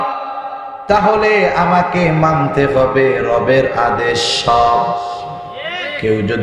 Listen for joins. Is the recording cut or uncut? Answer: uncut